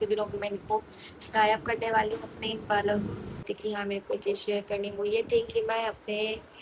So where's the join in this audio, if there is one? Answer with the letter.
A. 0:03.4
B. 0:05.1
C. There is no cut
A